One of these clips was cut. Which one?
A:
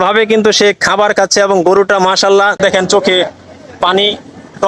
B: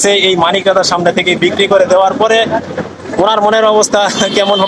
A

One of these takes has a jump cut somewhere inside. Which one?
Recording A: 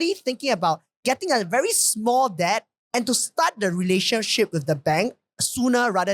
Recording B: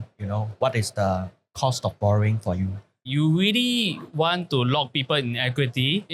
B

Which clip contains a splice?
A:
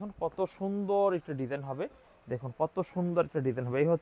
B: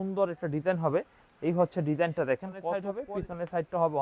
B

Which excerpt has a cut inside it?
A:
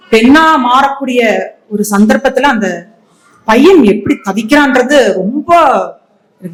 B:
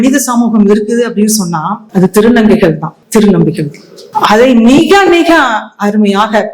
B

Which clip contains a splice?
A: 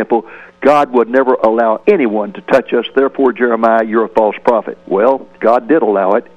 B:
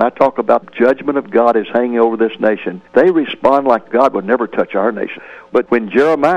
B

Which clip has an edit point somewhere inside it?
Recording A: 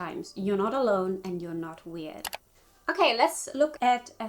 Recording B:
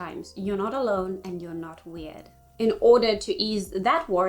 B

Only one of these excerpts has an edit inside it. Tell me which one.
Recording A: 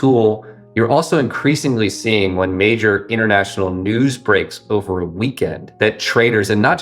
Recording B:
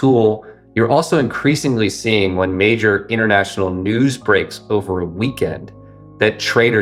A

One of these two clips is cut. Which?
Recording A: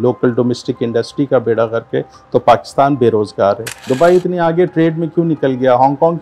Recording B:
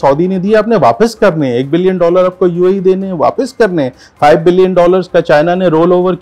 A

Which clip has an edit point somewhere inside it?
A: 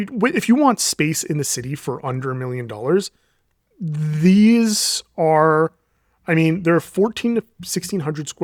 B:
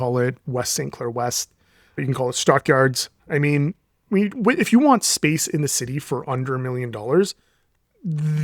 B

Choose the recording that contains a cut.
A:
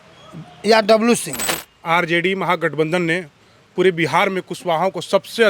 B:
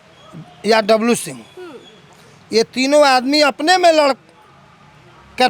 A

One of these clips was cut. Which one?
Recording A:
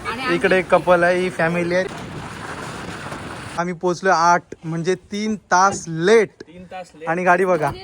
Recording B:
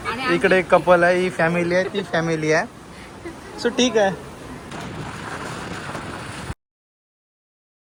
A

